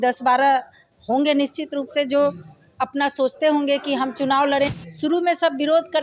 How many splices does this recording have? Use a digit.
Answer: 1